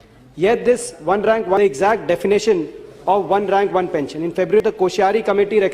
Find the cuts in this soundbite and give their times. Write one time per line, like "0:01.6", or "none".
0:01.6
0:04.6